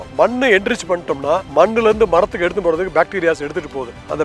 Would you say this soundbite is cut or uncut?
cut